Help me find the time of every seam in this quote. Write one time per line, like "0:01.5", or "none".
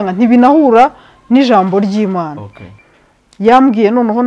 0:02.7